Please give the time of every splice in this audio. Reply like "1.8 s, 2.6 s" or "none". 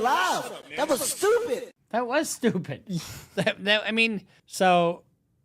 4.4 s